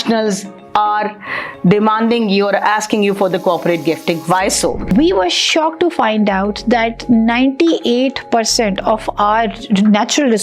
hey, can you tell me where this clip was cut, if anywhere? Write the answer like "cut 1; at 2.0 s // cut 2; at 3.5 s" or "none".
cut 1; at 4.9 s